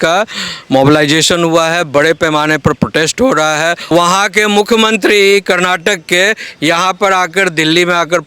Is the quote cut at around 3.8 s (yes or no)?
yes